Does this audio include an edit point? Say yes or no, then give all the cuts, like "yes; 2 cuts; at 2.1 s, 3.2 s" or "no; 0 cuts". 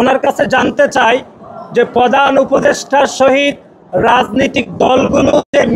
no; 0 cuts